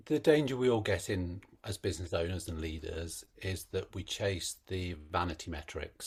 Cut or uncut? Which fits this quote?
uncut